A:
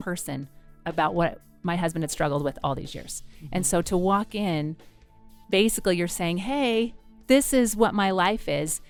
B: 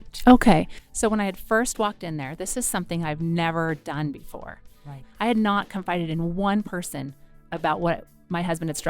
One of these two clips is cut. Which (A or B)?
B